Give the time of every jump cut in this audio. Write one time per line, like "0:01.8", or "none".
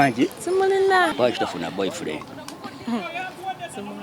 0:01.1